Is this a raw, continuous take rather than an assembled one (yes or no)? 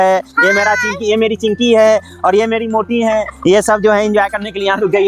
yes